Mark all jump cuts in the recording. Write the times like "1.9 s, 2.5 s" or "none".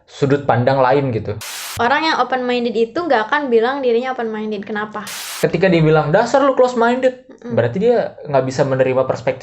1.7 s, 5.3 s